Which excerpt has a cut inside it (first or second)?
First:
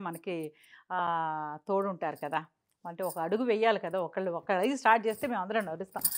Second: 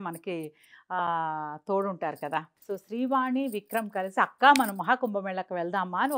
second